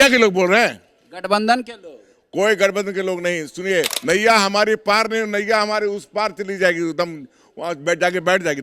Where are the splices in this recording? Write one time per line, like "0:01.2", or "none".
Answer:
0:03.9